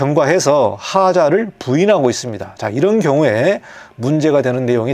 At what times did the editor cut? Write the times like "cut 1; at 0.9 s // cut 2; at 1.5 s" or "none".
none

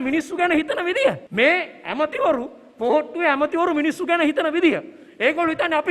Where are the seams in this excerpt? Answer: cut 1; at 1.2 s

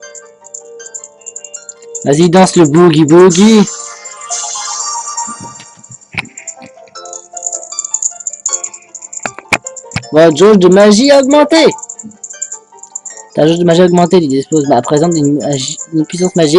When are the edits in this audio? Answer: cut 1; at 15.0 s

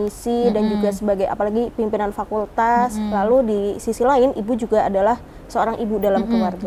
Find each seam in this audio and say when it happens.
none

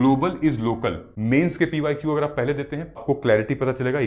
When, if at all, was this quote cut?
cut 1; at 1.1 s // cut 2; at 3.0 s

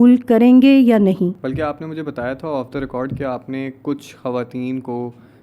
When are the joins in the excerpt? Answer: none

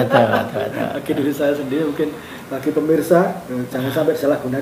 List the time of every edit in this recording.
none

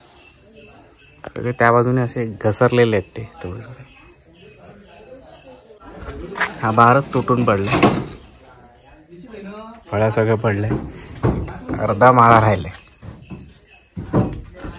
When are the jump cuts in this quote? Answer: cut 1; at 5.8 s

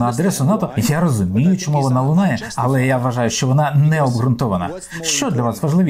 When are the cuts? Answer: none

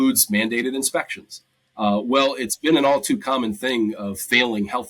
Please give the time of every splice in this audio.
none

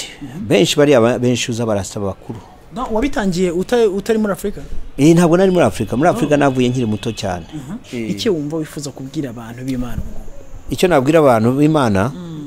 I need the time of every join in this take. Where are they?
cut 1; at 7.7 s

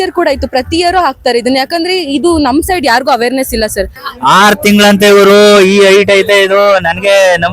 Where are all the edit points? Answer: cut 1; at 4.0 s

